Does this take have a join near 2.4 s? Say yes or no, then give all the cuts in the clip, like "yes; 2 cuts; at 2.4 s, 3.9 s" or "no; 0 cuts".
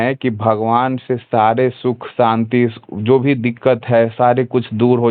no; 0 cuts